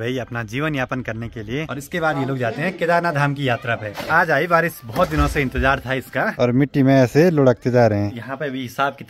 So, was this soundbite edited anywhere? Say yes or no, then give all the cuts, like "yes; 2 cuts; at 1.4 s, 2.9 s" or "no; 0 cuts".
yes; 4 cuts; at 1.8 s, 4.0 s, 6.4 s, 8.2 s